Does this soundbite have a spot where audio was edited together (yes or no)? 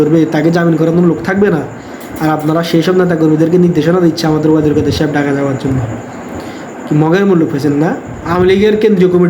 yes